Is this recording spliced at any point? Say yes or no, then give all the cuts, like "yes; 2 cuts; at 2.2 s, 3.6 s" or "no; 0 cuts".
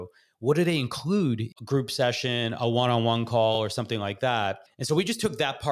yes; 2 cuts; at 1.5 s, 4.2 s